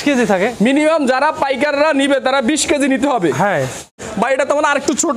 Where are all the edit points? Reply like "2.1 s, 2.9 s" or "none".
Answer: 3.9 s

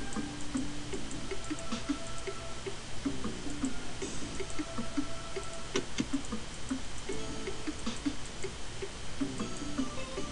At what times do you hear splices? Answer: 4.1 s

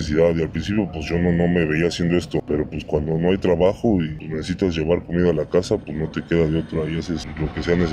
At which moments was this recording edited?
none

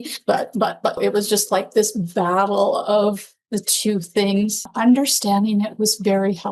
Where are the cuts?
1.0 s, 4.7 s

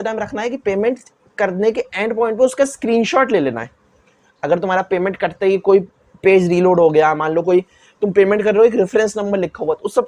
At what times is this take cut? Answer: none

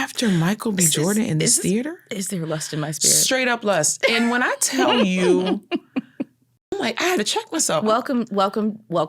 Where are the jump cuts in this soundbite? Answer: 6.7 s

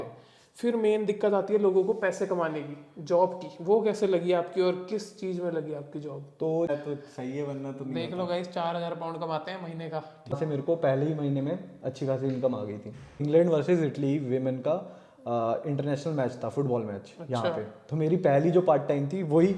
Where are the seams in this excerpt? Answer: 6.7 s, 10.3 s, 13.2 s

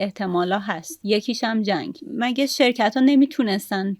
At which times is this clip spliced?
2.0 s

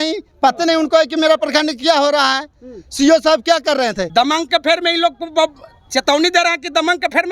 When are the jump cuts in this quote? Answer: 4.0 s

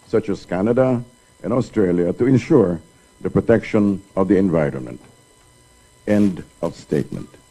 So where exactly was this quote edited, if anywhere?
1.7 s

